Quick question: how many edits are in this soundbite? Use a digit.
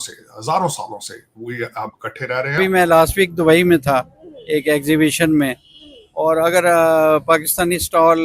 1